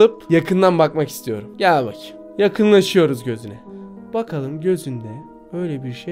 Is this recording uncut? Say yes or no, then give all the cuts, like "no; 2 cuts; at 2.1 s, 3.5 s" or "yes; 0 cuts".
no; 1 cut; at 1.4 s